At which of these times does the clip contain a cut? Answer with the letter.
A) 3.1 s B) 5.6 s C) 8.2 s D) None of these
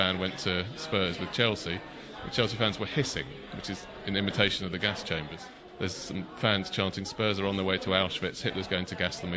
B